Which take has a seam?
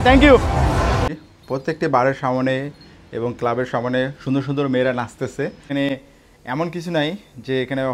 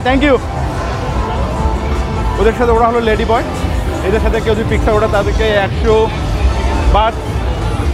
first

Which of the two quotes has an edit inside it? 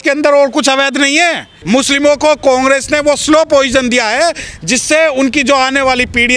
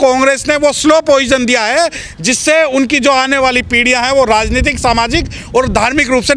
first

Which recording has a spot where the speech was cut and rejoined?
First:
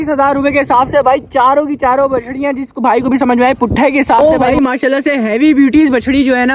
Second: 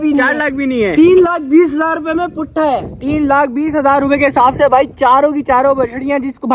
first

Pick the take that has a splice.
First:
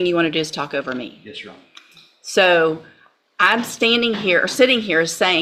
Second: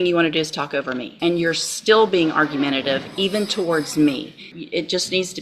second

